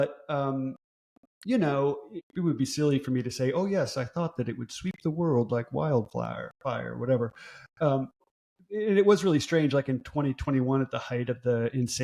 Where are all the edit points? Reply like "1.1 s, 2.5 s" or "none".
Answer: 2.3 s, 8.2 s